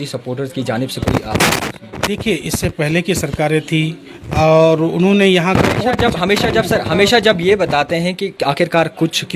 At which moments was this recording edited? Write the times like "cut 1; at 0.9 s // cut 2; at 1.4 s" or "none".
none